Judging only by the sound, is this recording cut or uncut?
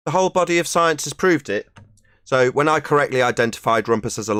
uncut